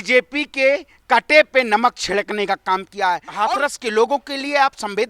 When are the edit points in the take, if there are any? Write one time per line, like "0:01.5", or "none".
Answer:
0:03.3

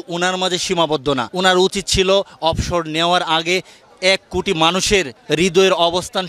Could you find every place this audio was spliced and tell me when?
0:01.3
0:05.2

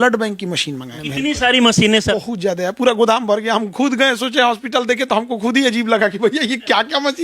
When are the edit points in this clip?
0:00.9
0:02.1

